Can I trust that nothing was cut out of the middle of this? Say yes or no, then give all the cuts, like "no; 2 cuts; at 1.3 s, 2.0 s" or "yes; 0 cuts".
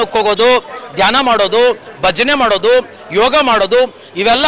yes; 0 cuts